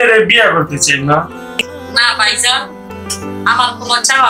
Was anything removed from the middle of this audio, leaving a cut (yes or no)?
yes